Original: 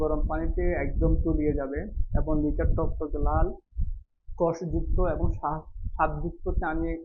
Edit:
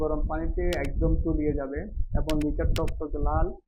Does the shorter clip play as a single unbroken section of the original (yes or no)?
yes